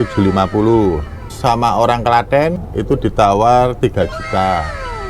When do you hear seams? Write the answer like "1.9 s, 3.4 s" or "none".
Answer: 1.3 s, 2.6 s